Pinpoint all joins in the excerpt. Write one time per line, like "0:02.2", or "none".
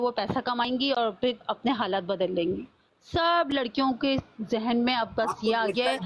none